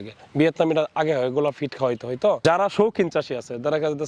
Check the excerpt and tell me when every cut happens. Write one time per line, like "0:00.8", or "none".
0:02.4

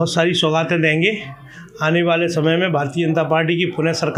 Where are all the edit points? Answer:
none

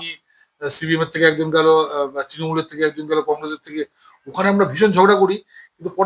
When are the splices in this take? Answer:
none

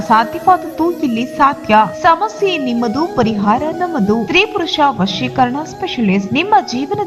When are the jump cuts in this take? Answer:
none

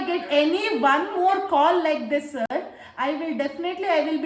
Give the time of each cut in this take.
none

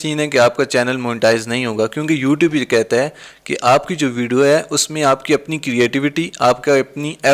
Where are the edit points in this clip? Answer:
none

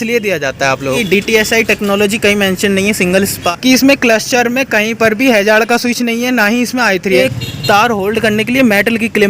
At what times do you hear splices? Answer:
0:01.0
0:03.4
0:07.2

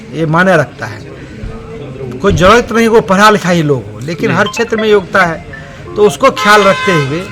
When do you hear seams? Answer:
none

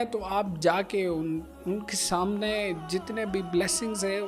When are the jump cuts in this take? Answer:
none

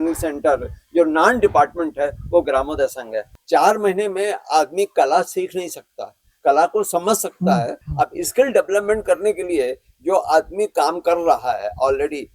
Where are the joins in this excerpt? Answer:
0:03.3
0:07.8

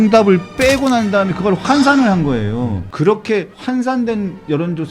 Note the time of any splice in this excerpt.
0:02.8
0:03.5

